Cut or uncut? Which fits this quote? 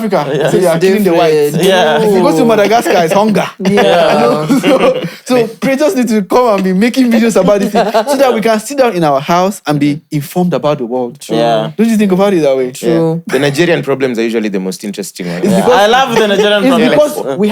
uncut